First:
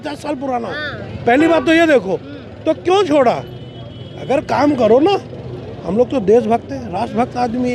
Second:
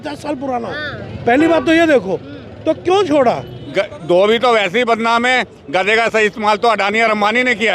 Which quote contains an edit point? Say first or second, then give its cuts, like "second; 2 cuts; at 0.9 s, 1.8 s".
second; 1 cut; at 3.6 s